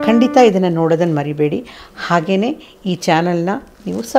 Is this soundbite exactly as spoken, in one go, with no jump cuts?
yes; 0 cuts

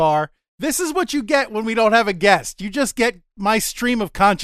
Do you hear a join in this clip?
no; 0 cuts

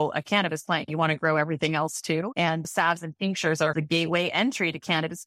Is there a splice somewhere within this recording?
yes; 2 cuts; at 2.7 s, 3.7 s

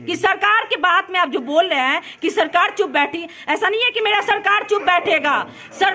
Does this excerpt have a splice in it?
no; 0 cuts

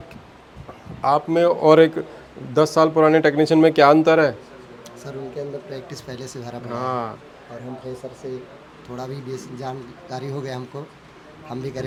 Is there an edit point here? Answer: no; 0 cuts

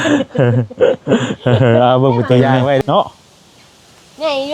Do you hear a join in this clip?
yes; 1 cut; at 2.8 s

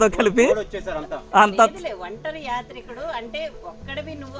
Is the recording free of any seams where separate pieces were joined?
yes; 0 cuts

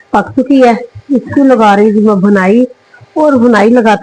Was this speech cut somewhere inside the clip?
no; 0 cuts

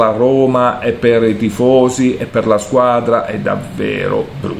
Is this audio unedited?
yes; 0 cuts

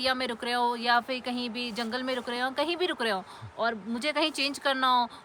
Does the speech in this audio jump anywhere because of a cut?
no; 0 cuts

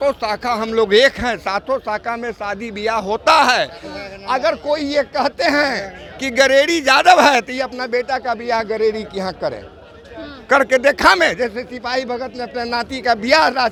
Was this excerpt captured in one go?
yes; 0 cuts

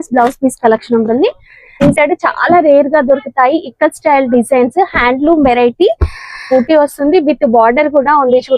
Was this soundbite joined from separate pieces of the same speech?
yes; 2 cuts; at 1.8 s, 6.4 s

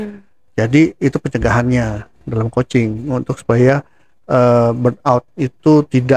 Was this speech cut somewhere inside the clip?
no; 0 cuts

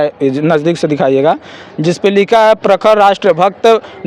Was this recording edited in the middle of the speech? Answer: no; 0 cuts

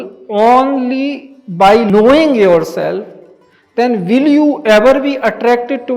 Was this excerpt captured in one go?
no; 1 cut; at 1.9 s

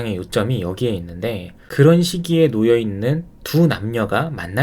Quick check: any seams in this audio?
yes; 1 cut; at 1.6 s

